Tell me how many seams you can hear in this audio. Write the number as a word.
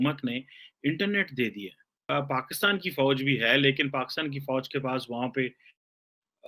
one